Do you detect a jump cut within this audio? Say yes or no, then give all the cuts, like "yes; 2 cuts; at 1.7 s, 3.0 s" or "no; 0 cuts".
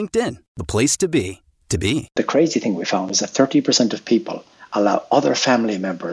yes; 1 cut; at 2.2 s